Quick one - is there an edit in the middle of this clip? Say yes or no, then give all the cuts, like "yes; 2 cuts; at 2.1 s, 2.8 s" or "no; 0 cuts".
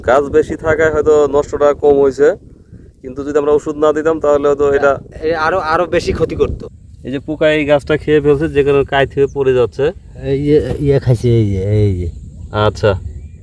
yes; 1 cut; at 6.6 s